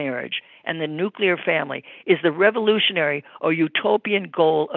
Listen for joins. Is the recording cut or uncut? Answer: uncut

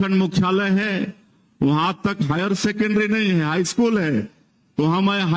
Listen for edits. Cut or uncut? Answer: uncut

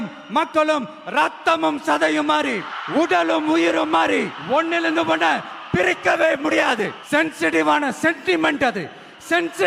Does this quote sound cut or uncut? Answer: cut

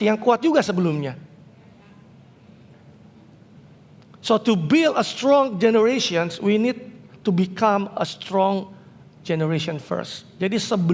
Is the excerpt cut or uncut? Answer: uncut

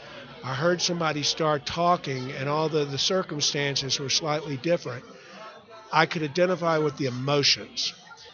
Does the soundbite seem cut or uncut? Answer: uncut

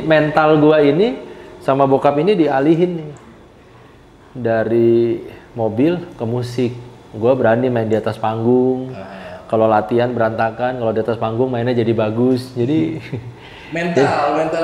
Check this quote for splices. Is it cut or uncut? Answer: uncut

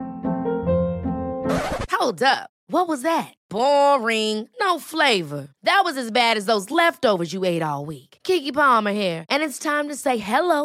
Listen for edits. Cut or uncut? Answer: uncut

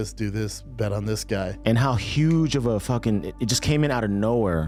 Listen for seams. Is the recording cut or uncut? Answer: uncut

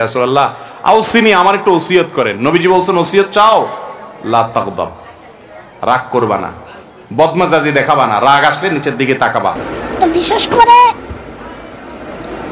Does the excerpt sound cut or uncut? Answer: cut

